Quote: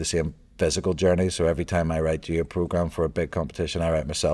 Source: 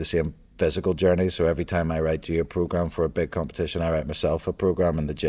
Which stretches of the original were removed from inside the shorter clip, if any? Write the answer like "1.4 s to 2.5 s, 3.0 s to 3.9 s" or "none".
none

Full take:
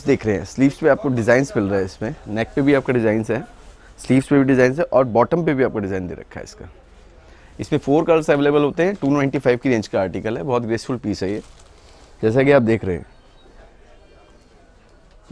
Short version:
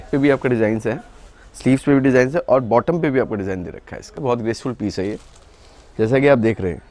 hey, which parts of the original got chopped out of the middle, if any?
6.6 s to 10.4 s

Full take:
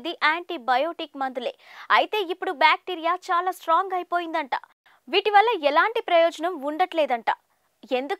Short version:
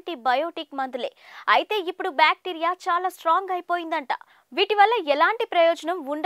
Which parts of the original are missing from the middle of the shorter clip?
4.8 s to 4.9 s

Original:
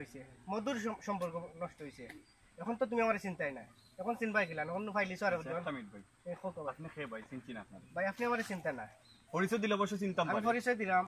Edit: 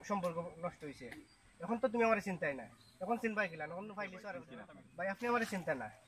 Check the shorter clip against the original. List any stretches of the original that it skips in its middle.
5.5 s to 7.5 s

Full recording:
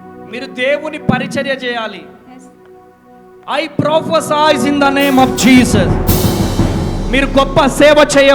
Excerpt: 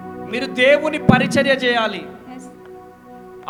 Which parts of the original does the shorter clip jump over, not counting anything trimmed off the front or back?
none

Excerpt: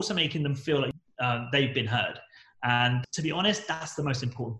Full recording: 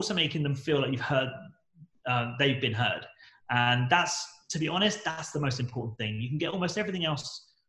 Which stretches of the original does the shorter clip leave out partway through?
0.9 s to 1.8 s, 3.8 s to 4.3 s

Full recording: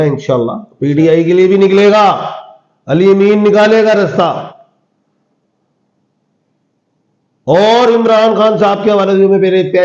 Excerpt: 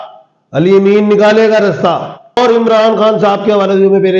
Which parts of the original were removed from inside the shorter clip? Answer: 4.7 s to 7.8 s

